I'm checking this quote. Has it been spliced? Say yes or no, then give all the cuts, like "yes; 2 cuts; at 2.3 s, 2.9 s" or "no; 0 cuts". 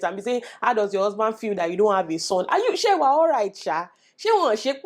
no; 0 cuts